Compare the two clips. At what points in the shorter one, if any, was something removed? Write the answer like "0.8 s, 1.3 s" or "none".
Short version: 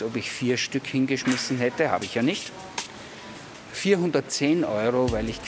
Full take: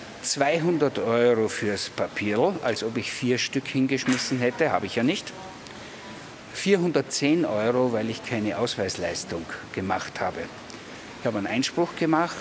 none